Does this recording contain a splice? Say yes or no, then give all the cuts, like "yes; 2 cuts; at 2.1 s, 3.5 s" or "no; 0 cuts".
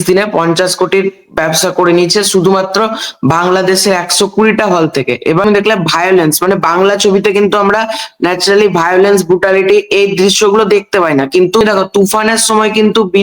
yes; 2 cuts; at 5.4 s, 11.6 s